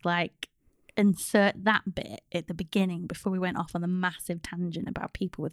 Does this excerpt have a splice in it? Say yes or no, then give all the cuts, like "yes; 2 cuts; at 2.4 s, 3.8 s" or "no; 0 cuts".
no; 0 cuts